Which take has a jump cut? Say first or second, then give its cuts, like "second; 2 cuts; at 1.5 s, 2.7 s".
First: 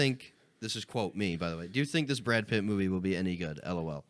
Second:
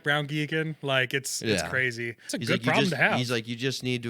second; 1 cut; at 2.2 s